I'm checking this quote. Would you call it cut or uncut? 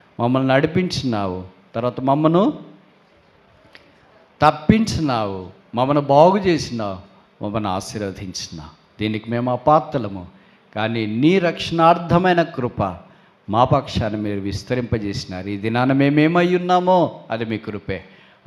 uncut